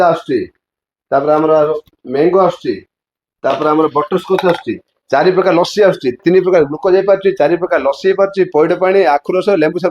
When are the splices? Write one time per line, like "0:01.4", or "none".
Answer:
0:06.2